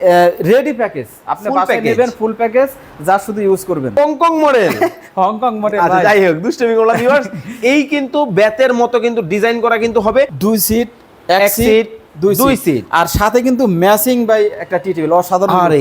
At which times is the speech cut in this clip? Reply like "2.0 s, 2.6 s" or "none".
3.9 s, 10.3 s